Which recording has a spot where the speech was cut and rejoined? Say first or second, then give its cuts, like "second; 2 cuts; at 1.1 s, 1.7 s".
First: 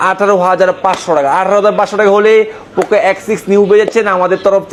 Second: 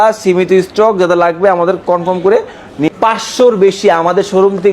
second; 1 cut; at 2.9 s